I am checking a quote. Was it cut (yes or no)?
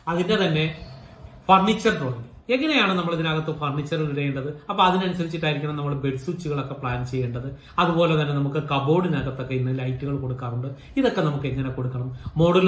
no